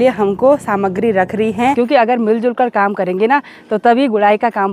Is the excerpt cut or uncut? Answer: cut